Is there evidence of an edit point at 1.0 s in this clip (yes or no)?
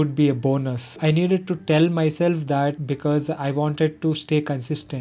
yes